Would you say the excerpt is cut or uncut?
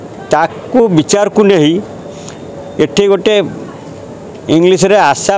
uncut